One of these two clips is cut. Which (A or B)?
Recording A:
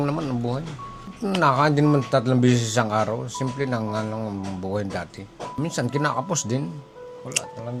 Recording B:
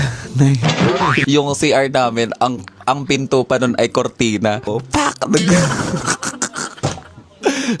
B